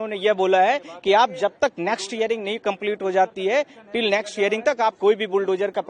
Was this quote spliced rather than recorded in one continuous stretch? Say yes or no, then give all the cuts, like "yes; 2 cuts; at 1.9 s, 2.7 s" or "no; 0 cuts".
no; 0 cuts